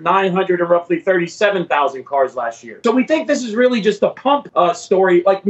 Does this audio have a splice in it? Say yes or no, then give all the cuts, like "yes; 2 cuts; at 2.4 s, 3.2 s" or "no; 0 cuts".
yes; 1 cut; at 2.8 s